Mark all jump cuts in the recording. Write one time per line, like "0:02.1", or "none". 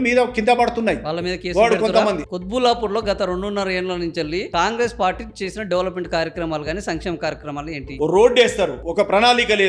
0:02.2
0:08.0